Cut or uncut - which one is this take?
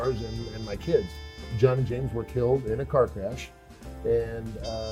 cut